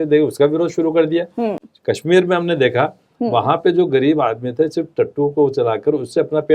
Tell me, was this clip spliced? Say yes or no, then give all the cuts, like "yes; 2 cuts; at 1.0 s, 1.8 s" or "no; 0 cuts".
no; 0 cuts